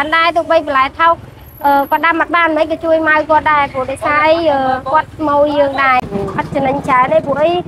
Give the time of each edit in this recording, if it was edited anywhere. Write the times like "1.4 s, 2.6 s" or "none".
6.1 s